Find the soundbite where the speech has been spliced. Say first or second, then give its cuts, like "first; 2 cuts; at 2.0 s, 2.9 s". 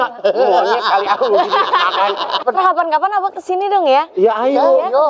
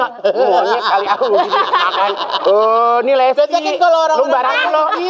first; 1 cut; at 2.3 s